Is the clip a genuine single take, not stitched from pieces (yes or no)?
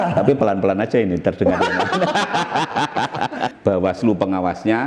no